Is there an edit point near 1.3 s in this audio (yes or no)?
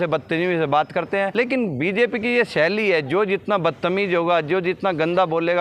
yes